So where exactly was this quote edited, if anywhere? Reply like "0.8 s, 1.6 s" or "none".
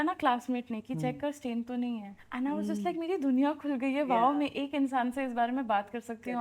2.2 s